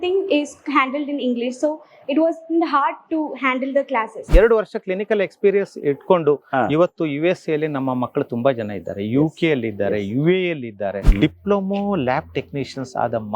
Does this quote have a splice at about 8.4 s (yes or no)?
no